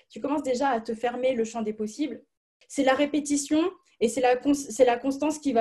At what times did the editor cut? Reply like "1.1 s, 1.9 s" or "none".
2.6 s